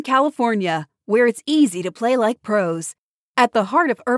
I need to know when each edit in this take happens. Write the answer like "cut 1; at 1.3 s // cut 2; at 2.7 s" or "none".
none